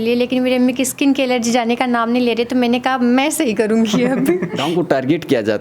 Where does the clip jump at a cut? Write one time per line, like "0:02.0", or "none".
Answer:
0:04.5